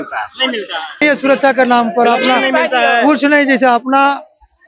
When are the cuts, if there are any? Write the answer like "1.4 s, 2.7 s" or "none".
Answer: 1.0 s